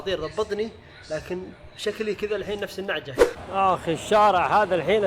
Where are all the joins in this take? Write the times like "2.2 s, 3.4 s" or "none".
3.4 s